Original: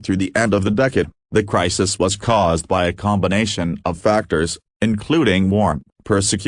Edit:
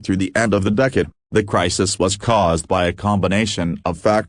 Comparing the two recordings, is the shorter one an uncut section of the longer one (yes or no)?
yes